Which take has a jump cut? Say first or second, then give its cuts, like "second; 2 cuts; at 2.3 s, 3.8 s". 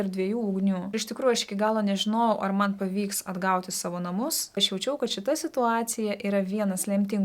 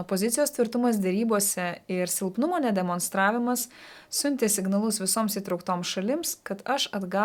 first; 2 cuts; at 0.9 s, 4.6 s